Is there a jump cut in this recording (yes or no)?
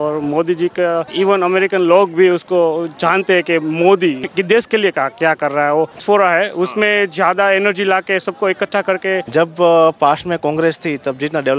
yes